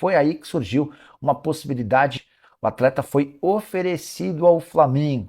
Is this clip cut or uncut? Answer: cut